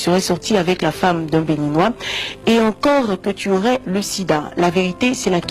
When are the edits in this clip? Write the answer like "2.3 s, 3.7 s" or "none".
none